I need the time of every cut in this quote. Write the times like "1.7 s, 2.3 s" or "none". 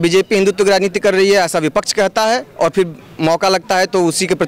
none

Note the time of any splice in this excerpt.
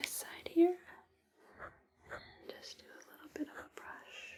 none

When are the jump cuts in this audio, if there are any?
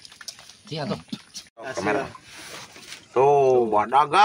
1.4 s

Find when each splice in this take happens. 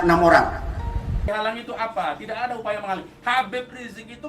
1.3 s

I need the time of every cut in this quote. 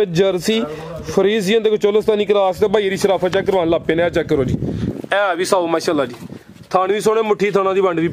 none

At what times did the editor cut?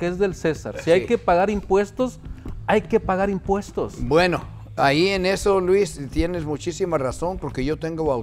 none

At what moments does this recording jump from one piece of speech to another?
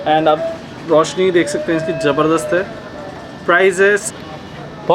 4.0 s

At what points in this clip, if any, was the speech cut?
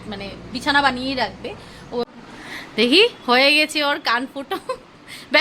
2.0 s

